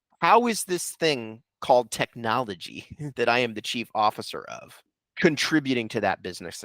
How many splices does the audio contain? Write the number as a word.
one